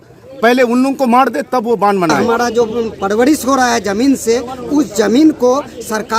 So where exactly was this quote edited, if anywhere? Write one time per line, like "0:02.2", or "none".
0:02.2